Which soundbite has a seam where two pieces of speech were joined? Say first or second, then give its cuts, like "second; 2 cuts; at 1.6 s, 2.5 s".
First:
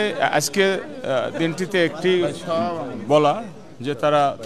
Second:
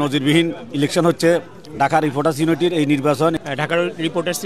second; 1 cut; at 3.4 s